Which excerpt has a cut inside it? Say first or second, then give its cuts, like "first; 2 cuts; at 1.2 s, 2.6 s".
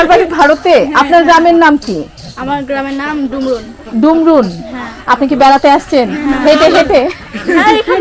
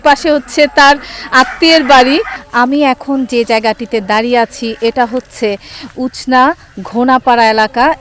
second; 1 cut; at 2.4 s